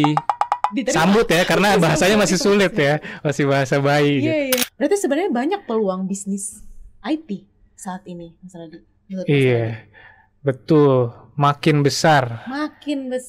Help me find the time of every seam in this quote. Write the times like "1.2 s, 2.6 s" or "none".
4.7 s